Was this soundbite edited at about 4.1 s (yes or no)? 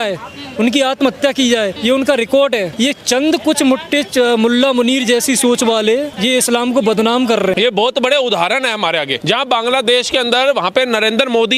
no